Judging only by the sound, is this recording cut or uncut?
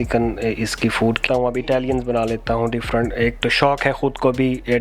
cut